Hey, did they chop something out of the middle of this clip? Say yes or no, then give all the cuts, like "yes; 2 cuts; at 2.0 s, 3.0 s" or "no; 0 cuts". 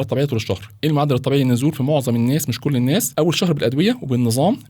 yes; 1 cut; at 3.1 s